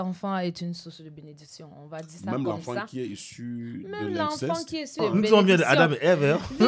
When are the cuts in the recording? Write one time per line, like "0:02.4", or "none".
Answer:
0:04.9